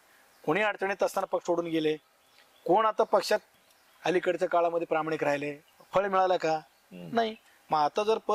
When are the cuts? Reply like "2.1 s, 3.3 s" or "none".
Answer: none